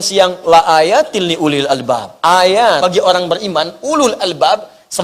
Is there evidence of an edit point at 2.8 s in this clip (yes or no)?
yes